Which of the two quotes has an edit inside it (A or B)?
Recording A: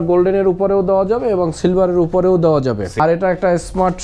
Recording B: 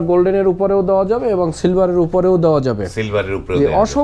A